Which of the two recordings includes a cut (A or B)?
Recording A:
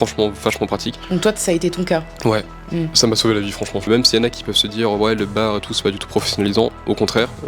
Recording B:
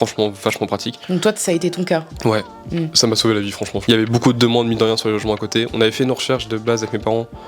A